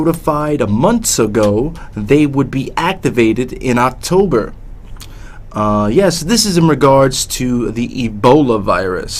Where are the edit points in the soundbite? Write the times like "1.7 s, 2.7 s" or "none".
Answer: 1.9 s